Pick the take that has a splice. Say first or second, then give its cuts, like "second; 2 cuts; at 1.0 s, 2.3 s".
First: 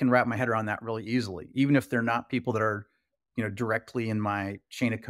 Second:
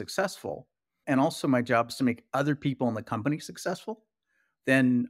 second; 1 cut; at 1.0 s